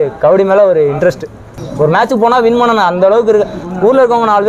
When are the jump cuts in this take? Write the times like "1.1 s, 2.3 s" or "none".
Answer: 1.6 s

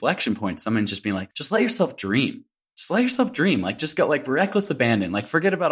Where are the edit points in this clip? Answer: 1.3 s

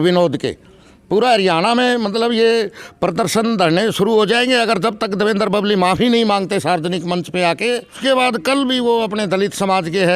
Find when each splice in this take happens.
8.0 s

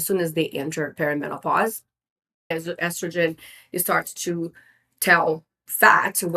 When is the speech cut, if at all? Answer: 2.5 s

